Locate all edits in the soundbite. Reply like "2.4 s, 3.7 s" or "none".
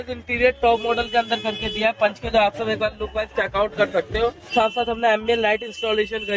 4.5 s